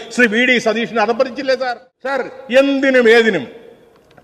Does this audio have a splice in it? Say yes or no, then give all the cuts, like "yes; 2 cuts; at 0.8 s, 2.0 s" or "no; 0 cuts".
yes; 1 cut; at 2.2 s